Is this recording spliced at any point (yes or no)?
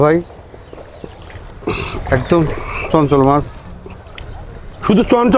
no